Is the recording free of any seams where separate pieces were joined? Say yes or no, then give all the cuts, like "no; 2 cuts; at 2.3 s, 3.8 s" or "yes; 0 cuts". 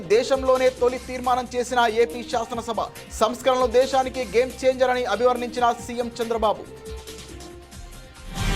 no; 1 cut; at 6.7 s